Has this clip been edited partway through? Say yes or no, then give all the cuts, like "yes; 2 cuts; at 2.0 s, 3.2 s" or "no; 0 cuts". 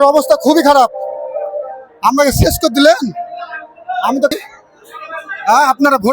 yes; 1 cut; at 4.3 s